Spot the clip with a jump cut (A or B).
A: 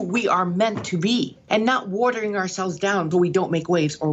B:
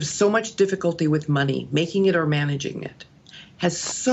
A